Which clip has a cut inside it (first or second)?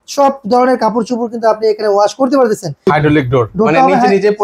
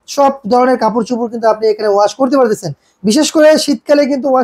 first